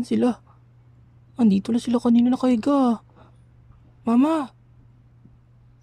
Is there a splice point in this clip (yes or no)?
no